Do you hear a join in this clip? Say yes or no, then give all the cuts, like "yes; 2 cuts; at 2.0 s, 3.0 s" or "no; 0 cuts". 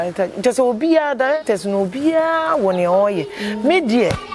no; 0 cuts